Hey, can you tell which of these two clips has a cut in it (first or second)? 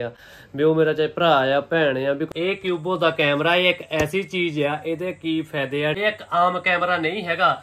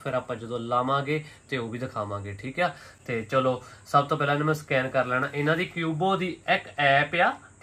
first